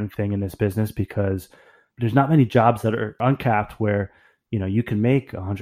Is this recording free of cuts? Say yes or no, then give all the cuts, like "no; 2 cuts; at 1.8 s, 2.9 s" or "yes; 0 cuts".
no; 1 cut; at 1.9 s